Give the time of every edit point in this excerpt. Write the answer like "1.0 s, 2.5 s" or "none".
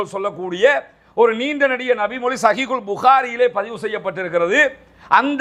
none